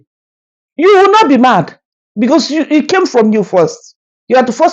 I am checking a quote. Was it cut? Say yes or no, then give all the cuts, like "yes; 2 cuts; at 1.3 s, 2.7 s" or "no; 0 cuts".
no; 0 cuts